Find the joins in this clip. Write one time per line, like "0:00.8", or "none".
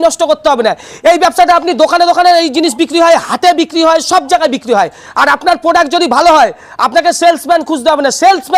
none